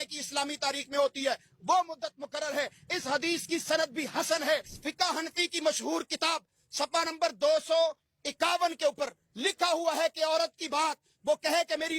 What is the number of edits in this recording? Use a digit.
1